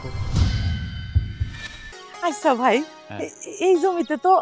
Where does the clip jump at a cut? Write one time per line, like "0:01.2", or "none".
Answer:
0:02.0